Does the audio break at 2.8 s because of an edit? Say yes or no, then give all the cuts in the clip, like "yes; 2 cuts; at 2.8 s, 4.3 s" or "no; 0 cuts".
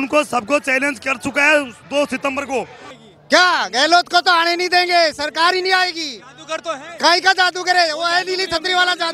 yes; 1 cut; at 2.8 s